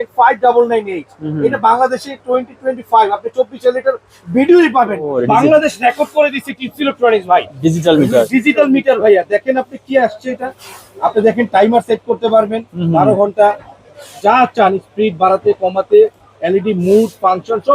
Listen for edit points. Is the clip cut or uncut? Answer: cut